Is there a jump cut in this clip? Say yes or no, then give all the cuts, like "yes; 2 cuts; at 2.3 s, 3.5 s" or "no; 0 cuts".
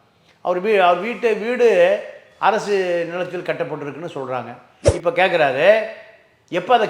yes; 1 cut; at 4.8 s